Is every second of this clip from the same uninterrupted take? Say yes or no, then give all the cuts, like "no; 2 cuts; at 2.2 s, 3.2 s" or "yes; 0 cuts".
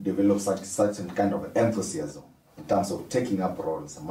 yes; 0 cuts